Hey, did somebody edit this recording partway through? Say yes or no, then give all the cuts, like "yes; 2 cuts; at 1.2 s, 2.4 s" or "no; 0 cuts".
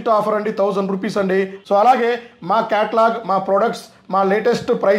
yes; 1 cut; at 1.6 s